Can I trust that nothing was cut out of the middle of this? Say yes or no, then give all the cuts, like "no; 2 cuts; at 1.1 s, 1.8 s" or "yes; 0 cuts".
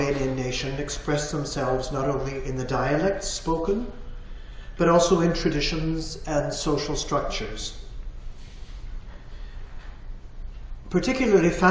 yes; 0 cuts